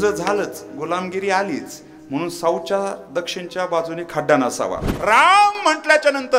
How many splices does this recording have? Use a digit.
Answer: 1